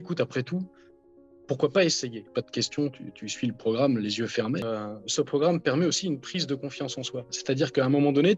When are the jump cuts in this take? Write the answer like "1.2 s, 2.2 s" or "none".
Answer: 2.2 s, 4.6 s